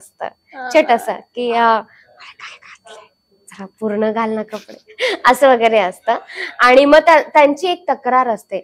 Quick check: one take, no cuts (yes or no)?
yes